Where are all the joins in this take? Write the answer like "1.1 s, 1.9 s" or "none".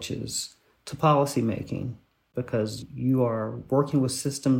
2.4 s